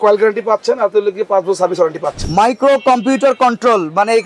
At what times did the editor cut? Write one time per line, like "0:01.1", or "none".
0:02.3